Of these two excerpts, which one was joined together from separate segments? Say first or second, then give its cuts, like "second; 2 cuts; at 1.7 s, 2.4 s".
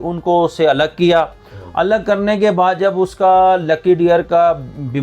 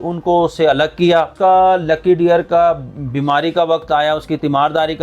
second; 1 cut; at 1.3 s